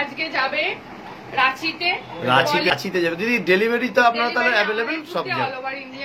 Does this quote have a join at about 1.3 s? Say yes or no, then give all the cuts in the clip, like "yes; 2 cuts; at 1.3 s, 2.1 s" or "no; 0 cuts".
no; 1 cut; at 2.7 s